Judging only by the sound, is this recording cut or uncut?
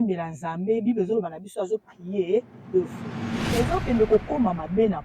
cut